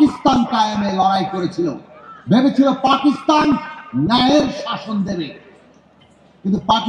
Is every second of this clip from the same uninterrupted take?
yes; 0 cuts

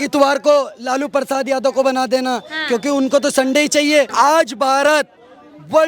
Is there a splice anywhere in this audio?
yes; 1 cut; at 4.1 s

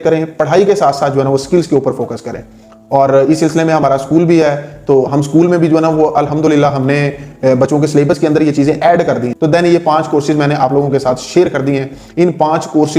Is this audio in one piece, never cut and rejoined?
no; 1 cut; at 9.3 s

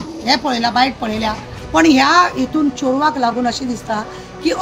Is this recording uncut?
no; 1 cut; at 1.5 s

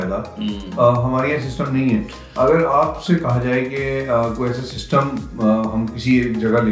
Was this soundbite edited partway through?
no; 0 cuts

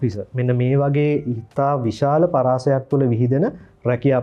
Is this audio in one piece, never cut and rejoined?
yes; 0 cuts

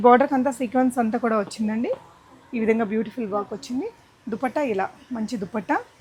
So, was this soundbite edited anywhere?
no; 0 cuts

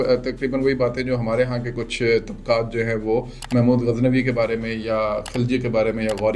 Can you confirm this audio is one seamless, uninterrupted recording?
yes; 0 cuts

